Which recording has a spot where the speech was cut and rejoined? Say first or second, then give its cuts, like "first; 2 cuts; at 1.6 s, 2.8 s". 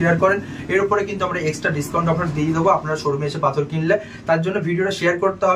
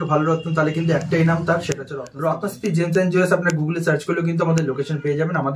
second; 1 cut; at 2.1 s